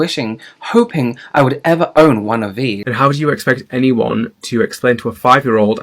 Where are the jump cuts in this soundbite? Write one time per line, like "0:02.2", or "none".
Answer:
0:02.8